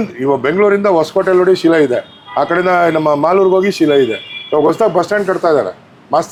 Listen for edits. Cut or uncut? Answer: uncut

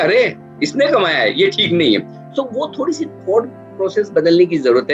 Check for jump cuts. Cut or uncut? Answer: uncut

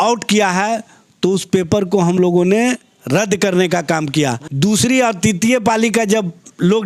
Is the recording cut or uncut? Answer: cut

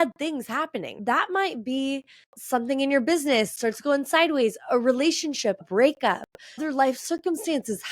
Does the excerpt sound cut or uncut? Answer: cut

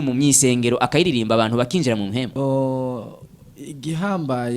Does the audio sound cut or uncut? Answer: cut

